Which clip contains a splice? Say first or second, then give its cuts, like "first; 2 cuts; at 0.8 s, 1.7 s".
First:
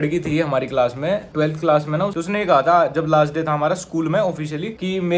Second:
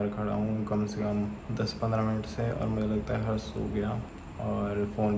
first; 2 cuts; at 1.3 s, 2.1 s